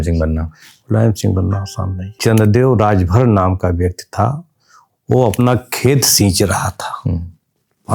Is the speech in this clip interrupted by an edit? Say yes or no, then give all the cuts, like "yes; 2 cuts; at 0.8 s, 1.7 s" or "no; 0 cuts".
yes; 1 cut; at 2.2 s